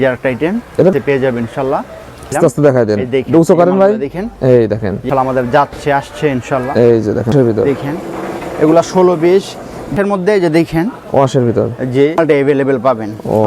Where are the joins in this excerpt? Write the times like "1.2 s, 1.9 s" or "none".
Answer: 0.9 s, 2.3 s, 5.0 s, 7.3 s, 12.2 s